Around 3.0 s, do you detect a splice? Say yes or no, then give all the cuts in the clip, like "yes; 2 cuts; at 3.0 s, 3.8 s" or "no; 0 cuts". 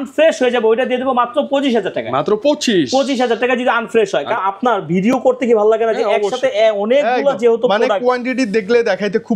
no; 1 cut; at 4.4 s